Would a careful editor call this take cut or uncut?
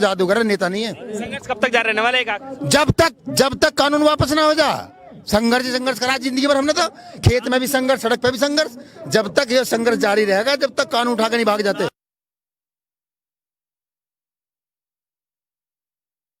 uncut